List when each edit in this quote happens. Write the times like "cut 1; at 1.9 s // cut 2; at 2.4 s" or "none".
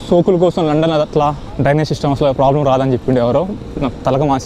cut 1; at 1.5 s